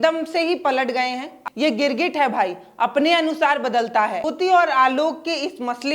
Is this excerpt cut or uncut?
cut